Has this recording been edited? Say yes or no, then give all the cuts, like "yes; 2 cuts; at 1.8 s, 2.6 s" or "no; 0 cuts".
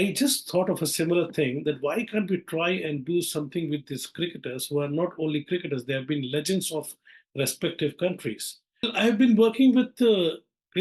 yes; 1 cut; at 8.9 s